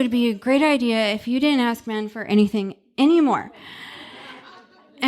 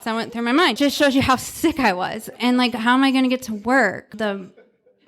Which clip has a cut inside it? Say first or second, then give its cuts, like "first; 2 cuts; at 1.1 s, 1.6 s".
second; 3 cuts; at 0.8 s, 2.4 s, 4.1 s